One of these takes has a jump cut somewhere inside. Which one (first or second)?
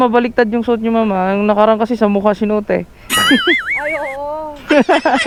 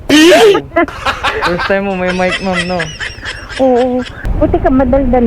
second